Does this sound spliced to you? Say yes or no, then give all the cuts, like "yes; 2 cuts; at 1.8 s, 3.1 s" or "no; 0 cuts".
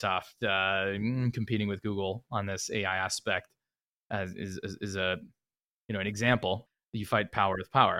yes; 1 cut; at 6.7 s